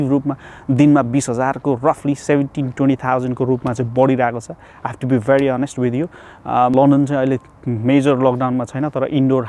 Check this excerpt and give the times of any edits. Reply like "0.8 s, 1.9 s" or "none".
6.8 s